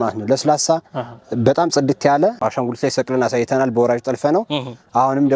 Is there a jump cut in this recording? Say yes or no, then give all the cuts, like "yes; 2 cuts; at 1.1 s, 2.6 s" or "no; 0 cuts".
yes; 1 cut; at 2.4 s